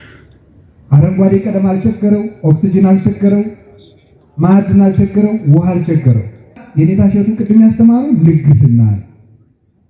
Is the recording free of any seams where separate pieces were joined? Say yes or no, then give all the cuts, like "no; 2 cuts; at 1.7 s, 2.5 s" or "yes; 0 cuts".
no; 1 cut; at 6.6 s